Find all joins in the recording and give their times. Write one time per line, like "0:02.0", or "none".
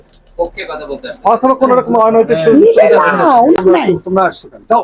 0:03.6